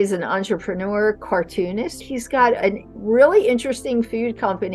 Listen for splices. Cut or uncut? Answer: cut